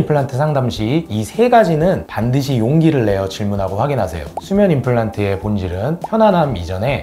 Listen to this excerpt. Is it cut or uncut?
cut